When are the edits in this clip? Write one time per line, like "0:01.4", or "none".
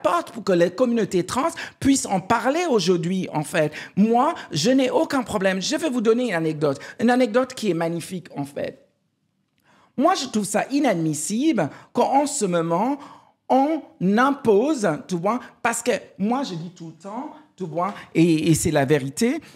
none

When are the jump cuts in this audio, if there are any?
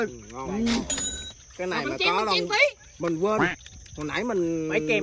none

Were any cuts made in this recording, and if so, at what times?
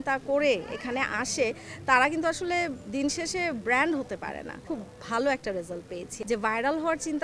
0:04.6
0:06.1

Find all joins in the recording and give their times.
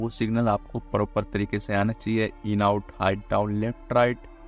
none

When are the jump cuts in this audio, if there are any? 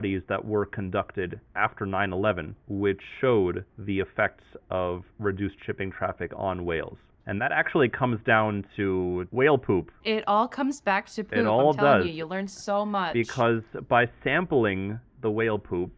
0:01.4
0:02.6
0:03.7

